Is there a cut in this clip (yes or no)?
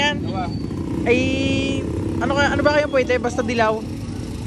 no